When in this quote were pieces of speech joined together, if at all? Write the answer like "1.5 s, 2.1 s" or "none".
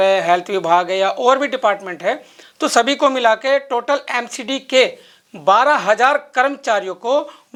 none